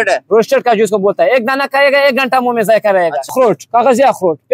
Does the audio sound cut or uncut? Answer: cut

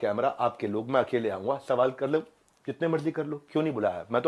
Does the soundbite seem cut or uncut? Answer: uncut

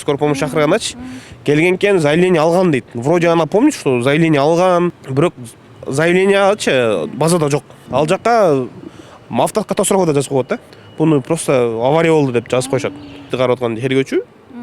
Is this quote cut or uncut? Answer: cut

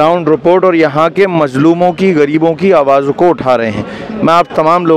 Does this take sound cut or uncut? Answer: uncut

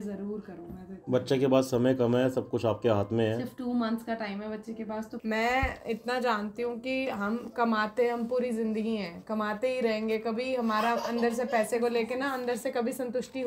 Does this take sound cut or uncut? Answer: cut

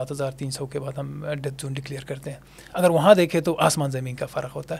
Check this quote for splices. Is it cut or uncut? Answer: uncut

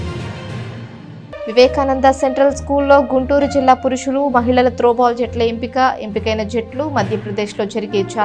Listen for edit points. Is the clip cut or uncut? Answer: cut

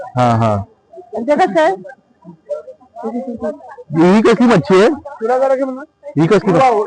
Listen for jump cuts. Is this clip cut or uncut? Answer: uncut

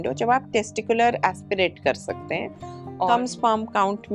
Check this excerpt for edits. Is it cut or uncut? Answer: cut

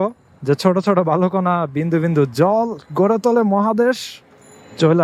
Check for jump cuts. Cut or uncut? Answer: uncut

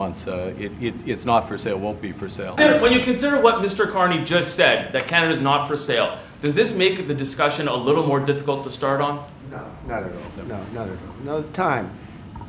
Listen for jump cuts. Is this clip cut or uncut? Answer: cut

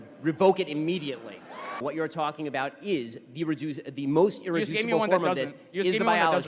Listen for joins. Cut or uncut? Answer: cut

